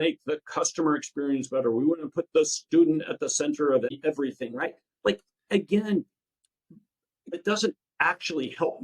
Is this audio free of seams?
no; 2 cuts; at 3.9 s, 7.4 s

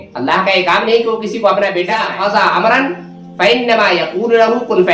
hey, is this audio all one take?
no; 1 cut; at 2.0 s

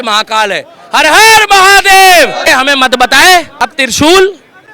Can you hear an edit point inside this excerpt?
yes; 2 cuts; at 2.5 s, 3.8 s

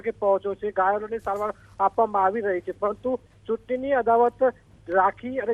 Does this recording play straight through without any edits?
yes; 0 cuts

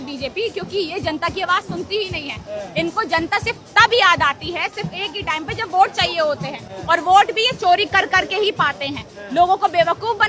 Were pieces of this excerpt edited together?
no; 0 cuts

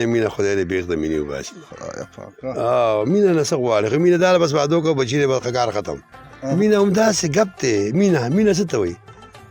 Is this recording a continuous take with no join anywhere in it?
no; 1 cut; at 6.5 s

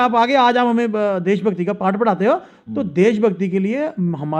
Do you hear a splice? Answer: no; 0 cuts

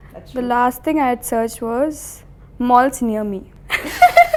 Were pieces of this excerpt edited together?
no; 0 cuts

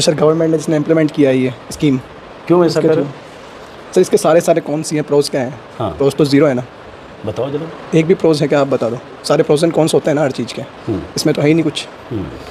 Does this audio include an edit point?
no; 0 cuts

